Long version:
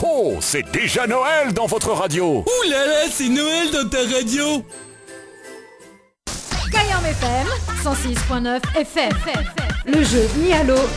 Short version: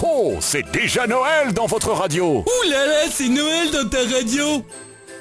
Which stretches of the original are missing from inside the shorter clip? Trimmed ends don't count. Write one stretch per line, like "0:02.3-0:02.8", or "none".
none